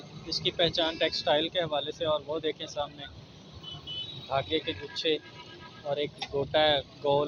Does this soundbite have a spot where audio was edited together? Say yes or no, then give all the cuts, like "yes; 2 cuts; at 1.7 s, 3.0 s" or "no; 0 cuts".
no; 0 cuts